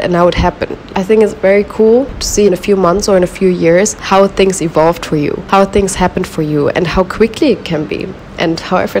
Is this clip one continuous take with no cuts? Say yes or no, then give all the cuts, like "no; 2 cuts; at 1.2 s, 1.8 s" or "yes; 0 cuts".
no; 4 cuts; at 0.9 s, 2.4 s, 4.0 s, 5.4 s